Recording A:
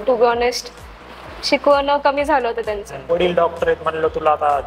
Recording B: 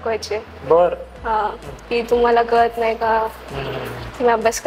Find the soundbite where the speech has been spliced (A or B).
A